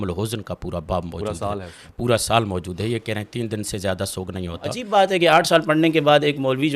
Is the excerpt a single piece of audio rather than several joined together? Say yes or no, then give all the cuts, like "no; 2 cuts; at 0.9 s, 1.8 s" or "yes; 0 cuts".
no; 1 cut; at 4.8 s